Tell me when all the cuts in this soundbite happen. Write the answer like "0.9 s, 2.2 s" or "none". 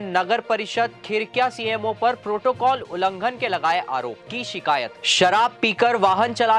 4.9 s